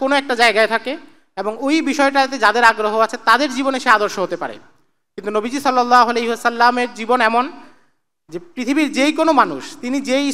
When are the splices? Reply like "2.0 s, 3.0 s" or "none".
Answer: none